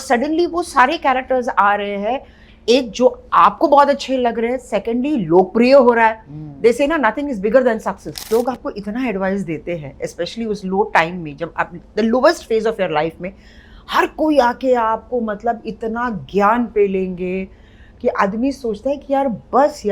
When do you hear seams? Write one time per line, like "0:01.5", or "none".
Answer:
0:08.3